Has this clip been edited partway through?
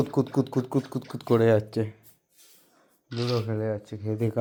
no; 0 cuts

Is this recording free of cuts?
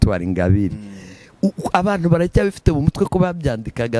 yes; 0 cuts

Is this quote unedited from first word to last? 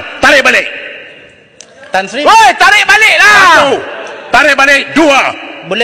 yes; 0 cuts

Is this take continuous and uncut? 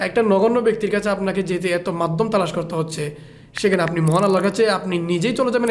yes; 0 cuts

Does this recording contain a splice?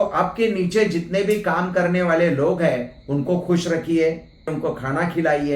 yes; 1 cut; at 4.5 s

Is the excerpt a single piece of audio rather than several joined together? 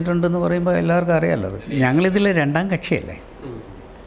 no; 1 cut; at 1.6 s

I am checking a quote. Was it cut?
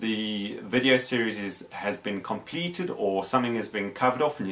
no; 0 cuts

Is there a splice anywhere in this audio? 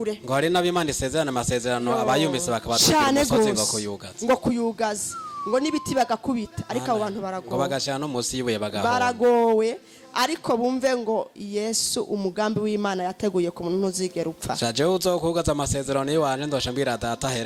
no; 0 cuts

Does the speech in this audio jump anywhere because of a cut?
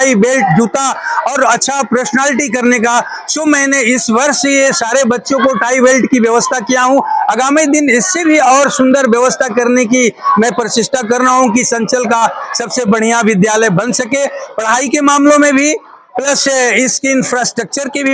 no; 0 cuts

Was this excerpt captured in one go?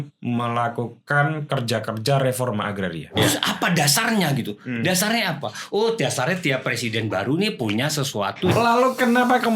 no; 2 cuts; at 3.1 s, 8.5 s

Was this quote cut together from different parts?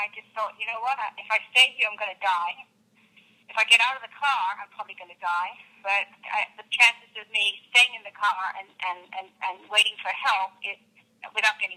no; 0 cuts

